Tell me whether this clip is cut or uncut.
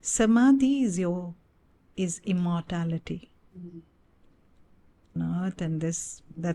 cut